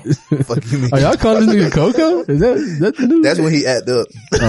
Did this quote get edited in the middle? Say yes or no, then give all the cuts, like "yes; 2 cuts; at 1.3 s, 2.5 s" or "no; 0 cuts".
no; 0 cuts